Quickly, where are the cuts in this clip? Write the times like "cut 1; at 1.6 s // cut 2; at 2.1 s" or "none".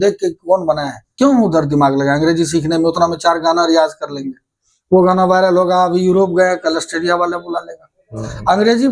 cut 1; at 1.1 s